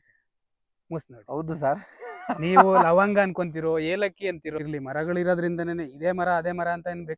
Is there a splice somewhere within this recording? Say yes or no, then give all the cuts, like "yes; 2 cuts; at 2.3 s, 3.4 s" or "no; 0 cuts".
yes; 1 cut; at 4.6 s